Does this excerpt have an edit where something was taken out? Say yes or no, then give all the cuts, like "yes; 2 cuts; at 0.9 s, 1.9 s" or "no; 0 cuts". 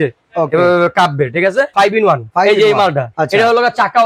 yes; 2 cuts; at 2.1 s, 3.1 s